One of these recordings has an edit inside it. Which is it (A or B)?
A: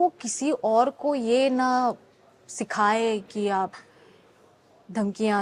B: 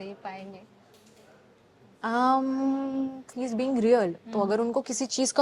B